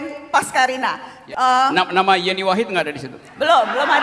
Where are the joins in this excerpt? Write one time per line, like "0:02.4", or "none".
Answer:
0:01.1